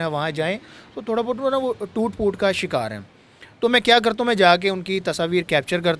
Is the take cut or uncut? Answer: uncut